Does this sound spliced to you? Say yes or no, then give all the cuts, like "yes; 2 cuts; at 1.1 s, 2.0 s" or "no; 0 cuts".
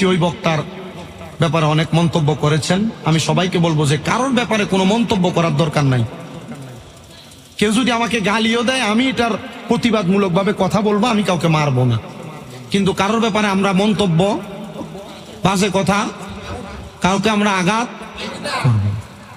no; 0 cuts